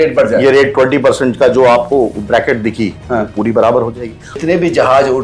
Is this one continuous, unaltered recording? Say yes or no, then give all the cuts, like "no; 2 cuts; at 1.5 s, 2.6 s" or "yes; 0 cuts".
no; 1 cut; at 4.3 s